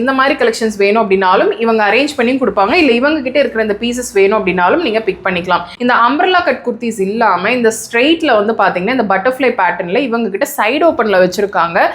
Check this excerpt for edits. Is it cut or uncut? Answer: cut